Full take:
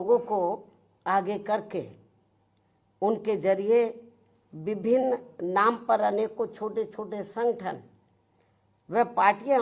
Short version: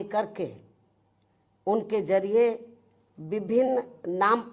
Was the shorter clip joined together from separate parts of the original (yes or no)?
no